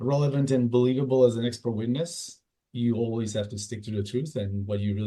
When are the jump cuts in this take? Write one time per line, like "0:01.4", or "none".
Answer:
none